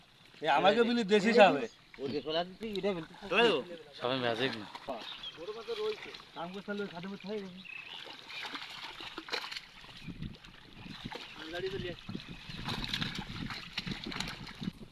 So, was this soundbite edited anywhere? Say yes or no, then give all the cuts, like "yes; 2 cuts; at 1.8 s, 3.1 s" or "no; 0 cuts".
yes; 1 cut; at 4.9 s